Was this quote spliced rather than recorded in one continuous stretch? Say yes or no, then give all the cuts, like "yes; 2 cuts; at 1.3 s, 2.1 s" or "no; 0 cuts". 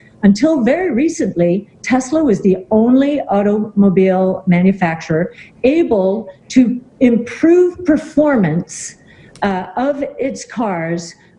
no; 0 cuts